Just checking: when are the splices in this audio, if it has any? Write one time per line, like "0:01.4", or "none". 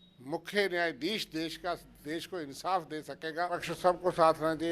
0:03.7